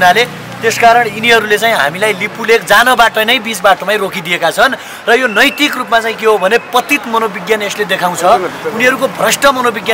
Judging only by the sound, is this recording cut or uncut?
uncut